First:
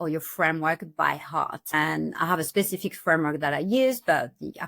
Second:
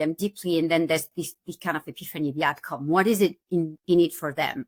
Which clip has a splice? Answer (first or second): first